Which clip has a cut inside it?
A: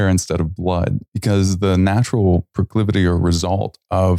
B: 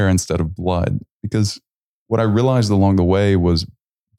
A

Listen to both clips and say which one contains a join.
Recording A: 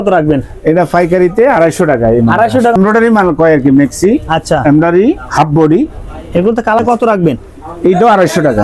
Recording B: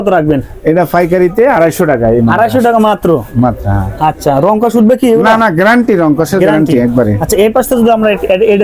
A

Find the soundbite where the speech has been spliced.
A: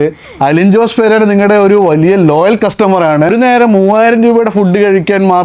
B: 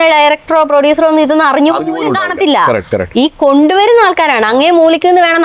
A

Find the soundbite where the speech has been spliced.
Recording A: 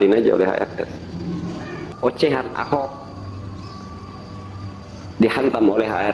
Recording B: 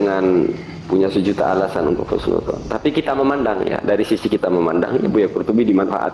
A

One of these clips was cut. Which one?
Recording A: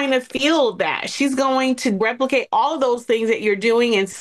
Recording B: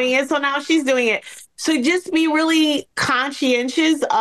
A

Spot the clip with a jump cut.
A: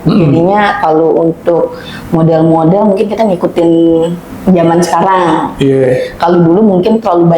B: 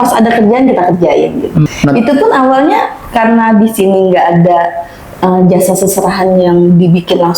B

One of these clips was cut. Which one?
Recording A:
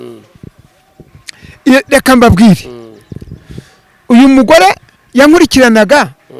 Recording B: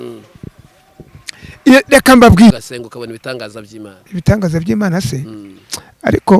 B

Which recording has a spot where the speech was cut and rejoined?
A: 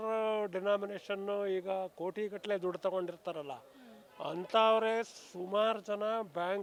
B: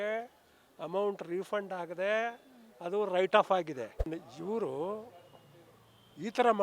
B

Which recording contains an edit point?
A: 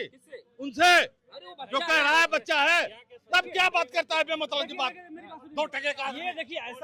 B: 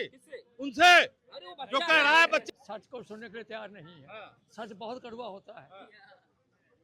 B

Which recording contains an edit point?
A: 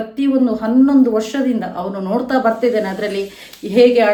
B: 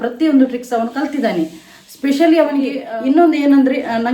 B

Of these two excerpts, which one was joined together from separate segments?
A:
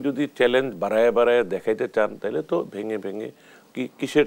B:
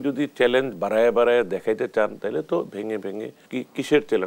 B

